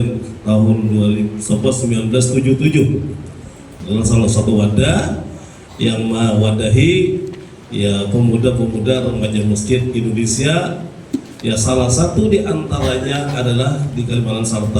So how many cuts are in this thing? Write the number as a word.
one